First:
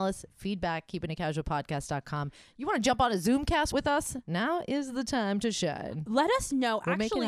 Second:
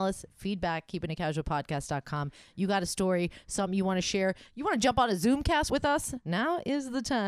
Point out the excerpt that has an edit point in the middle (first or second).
first